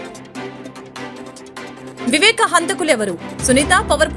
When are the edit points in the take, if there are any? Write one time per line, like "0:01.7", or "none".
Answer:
0:01.0